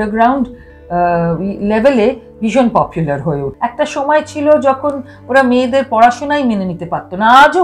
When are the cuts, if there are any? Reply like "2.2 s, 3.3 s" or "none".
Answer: 3.5 s